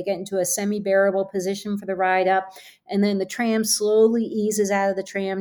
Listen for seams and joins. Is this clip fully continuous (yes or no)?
yes